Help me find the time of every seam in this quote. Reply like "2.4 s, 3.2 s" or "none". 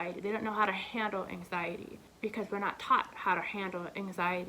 2.0 s